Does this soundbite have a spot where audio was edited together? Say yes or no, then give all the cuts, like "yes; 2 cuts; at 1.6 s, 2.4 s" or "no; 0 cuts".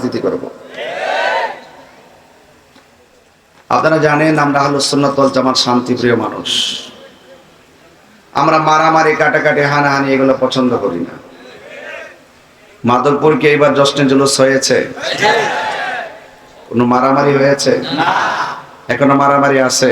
yes; 1 cut; at 3.3 s